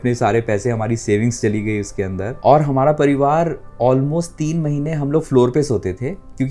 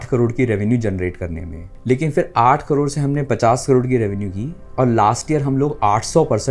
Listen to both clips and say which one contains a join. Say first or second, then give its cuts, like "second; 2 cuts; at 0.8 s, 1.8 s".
first; 1 cut; at 2.3 s